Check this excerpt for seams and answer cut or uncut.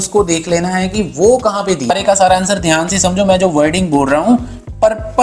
cut